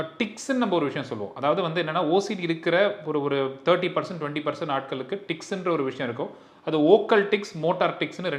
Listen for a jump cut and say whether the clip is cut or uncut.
uncut